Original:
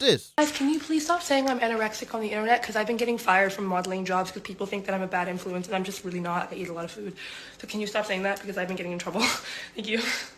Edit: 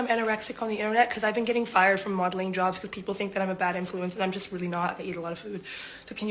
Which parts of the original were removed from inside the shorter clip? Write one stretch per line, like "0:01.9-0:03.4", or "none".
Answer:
none